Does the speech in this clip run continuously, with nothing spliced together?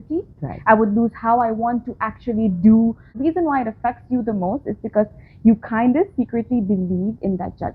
no; 1 cut; at 3.1 s

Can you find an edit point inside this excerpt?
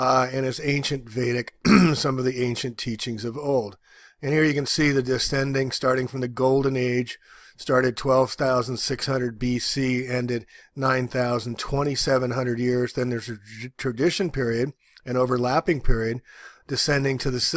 yes; 1 cut; at 5.8 s

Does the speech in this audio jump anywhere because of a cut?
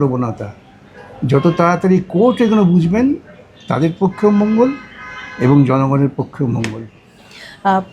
no; 0 cuts

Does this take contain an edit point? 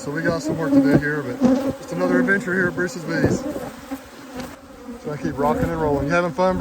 yes; 1 cut; at 4.6 s

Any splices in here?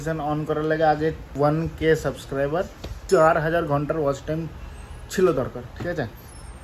yes; 2 cuts; at 1.3 s, 3.0 s

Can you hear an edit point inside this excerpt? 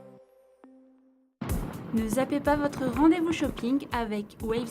yes; 1 cut; at 1.2 s

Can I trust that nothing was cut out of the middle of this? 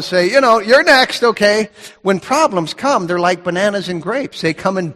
yes; 0 cuts

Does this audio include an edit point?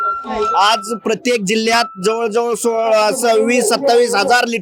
no; 0 cuts

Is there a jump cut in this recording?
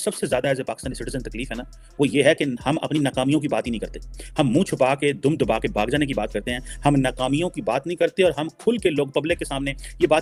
no; 0 cuts

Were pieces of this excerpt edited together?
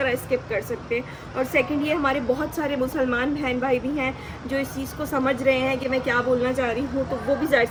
no; 0 cuts

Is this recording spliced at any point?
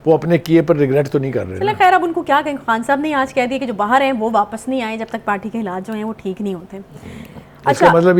no; 0 cuts

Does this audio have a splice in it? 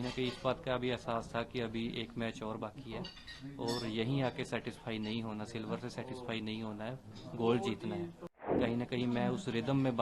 yes; 1 cut; at 8.5 s

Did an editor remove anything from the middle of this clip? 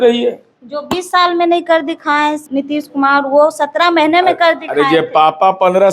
yes; 1 cut; at 2.4 s

